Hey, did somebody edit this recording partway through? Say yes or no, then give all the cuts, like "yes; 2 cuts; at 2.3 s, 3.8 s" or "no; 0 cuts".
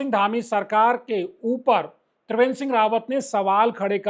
no; 0 cuts